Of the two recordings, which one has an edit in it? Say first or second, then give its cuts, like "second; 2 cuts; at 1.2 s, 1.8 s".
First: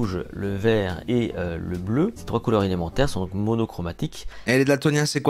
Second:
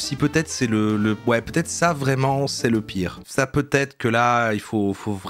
first; 3 cuts; at 1.0 s, 2.2 s, 4.4 s